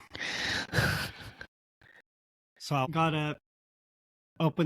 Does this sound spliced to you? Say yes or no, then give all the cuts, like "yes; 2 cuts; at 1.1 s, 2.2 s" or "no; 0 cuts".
yes; 1 cut; at 2.8 s